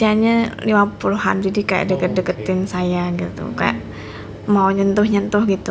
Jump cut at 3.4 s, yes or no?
no